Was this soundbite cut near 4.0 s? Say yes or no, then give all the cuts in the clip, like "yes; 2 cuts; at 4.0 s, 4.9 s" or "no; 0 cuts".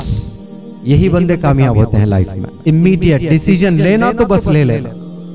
no; 1 cut; at 2.4 s